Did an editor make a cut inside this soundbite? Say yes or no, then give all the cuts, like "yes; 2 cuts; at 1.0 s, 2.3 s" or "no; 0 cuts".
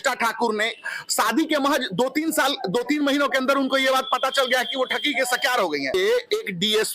yes; 1 cut; at 5.9 s